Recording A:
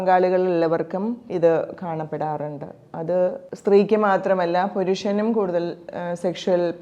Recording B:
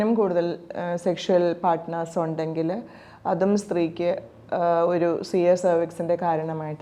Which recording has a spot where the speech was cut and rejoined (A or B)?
A